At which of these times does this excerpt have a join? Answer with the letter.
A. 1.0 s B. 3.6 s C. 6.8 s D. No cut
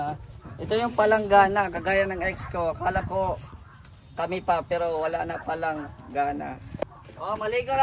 C